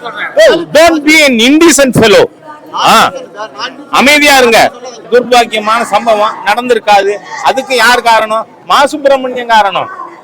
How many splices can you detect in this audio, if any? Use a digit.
1